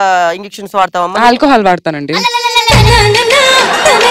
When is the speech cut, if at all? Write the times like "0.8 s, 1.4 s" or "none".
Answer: 2.7 s